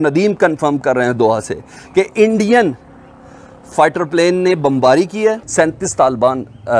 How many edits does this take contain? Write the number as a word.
one